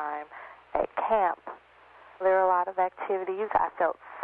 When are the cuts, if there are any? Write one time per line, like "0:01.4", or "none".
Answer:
none